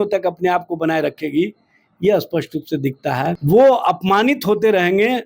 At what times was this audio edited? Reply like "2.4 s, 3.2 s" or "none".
3.4 s